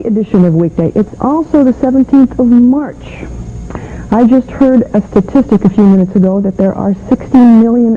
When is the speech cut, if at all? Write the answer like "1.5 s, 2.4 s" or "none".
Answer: 3.5 s